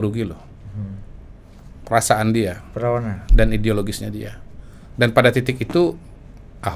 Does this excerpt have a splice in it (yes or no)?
no